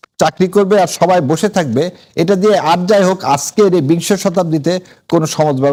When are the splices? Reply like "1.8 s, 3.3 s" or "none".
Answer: none